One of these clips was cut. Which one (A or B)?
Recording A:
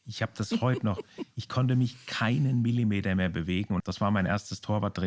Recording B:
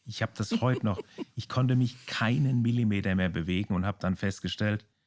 A